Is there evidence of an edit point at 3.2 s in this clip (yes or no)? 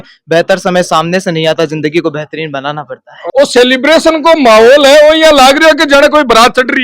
yes